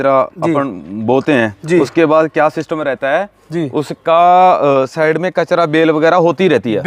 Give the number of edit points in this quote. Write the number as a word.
zero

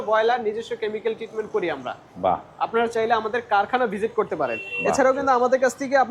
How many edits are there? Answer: zero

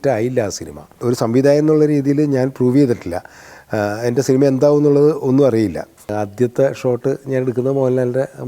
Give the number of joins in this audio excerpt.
two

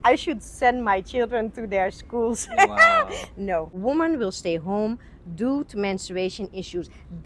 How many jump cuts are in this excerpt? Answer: one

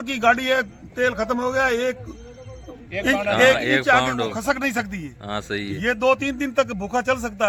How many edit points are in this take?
zero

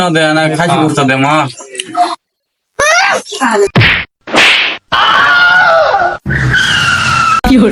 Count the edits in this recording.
zero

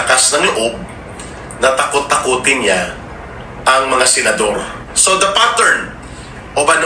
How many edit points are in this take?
one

